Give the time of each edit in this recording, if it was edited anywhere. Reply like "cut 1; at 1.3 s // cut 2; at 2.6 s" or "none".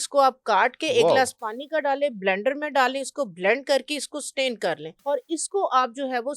cut 1; at 4.9 s